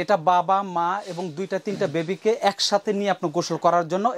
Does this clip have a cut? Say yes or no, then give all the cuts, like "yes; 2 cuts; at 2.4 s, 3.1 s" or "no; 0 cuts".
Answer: no; 0 cuts